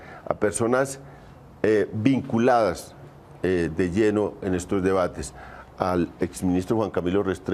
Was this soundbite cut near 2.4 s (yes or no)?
yes